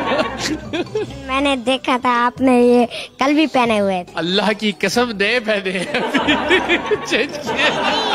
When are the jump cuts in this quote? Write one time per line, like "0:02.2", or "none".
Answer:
0:00.9